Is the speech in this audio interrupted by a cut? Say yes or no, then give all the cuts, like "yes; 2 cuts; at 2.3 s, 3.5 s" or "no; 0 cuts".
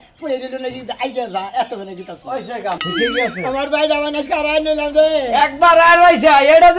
yes; 1 cut; at 2.8 s